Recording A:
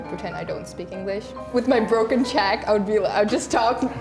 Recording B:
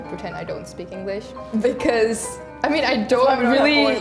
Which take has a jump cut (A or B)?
A